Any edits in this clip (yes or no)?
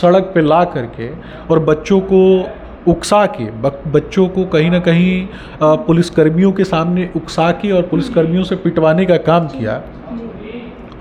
no